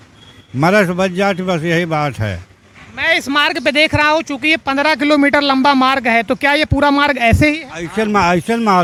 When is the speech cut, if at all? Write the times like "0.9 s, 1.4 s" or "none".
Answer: none